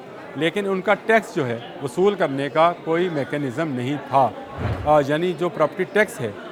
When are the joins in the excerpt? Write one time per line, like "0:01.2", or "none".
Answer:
none